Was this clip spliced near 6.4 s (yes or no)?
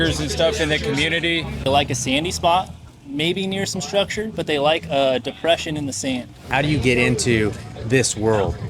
yes